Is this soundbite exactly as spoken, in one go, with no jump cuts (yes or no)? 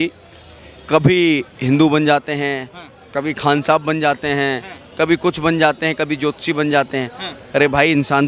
yes